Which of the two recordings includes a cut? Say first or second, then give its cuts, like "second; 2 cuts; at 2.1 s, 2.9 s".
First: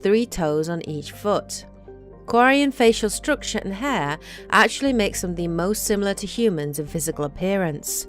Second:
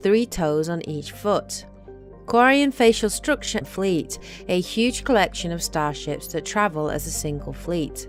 first; 1 cut; at 3.7 s